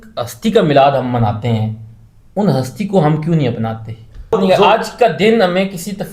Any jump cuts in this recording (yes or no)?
yes